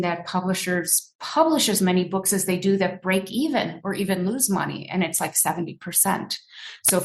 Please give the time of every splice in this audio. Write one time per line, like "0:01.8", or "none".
none